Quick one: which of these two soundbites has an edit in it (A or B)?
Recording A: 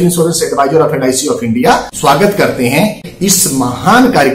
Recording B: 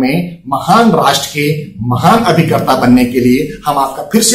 A